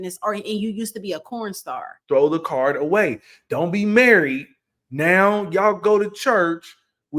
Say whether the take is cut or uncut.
cut